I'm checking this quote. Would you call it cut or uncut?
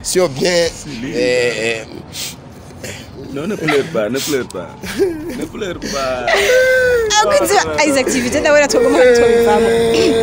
uncut